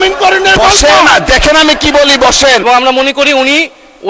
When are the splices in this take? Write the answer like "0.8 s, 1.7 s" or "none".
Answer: 2.6 s